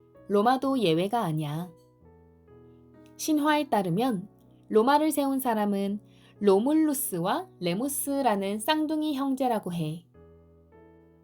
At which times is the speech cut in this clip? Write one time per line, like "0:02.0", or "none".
0:10.1